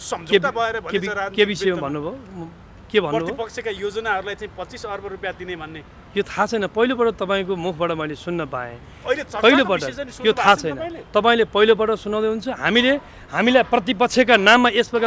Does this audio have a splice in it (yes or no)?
no